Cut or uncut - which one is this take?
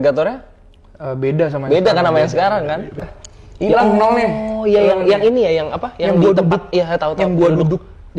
cut